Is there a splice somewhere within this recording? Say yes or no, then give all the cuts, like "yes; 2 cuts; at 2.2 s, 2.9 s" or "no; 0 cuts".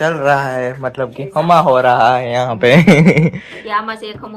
no; 0 cuts